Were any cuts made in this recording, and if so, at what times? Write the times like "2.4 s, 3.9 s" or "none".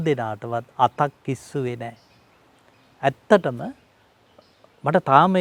none